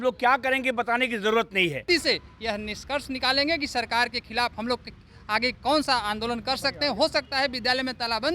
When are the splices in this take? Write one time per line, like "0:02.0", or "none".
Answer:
0:01.8